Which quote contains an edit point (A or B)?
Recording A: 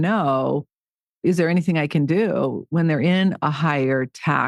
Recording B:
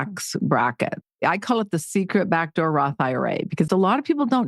B